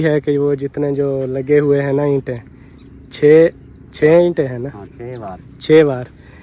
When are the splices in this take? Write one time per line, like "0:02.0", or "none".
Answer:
none